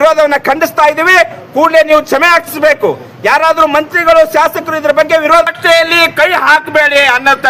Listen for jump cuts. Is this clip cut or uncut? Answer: cut